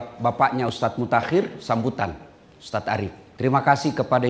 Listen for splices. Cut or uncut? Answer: cut